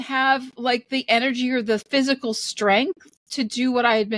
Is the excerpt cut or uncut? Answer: uncut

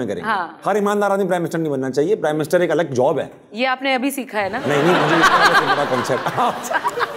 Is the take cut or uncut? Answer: uncut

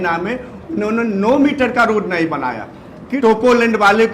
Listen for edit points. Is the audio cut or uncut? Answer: cut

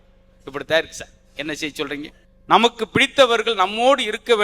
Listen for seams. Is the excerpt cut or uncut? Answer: cut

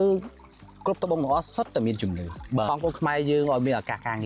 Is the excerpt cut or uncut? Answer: cut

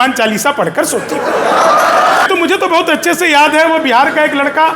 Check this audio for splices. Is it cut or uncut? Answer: cut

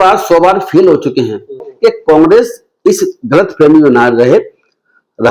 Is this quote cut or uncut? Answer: cut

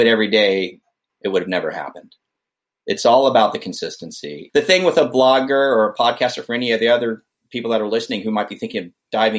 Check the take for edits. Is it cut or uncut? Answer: uncut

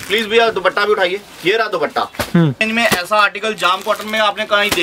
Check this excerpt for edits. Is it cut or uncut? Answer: cut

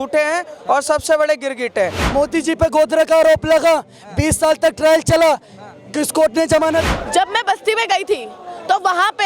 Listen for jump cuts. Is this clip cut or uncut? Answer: cut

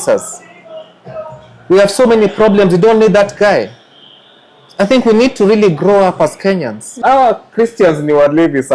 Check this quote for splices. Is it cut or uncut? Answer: cut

